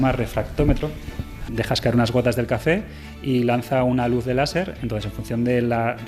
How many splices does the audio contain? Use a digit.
1